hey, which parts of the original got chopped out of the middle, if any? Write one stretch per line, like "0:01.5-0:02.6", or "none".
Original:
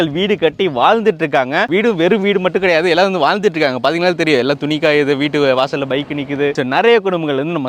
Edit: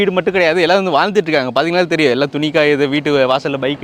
none